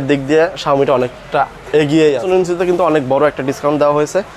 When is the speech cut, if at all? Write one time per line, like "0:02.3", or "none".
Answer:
0:02.2